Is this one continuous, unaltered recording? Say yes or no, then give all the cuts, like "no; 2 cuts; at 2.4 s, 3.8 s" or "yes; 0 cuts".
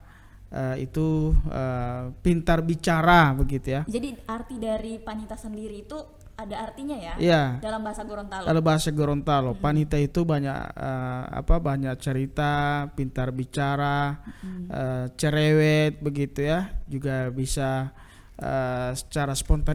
yes; 0 cuts